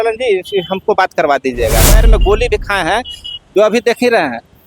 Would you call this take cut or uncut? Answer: cut